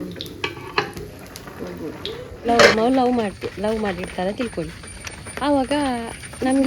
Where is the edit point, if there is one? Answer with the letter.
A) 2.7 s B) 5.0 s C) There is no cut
A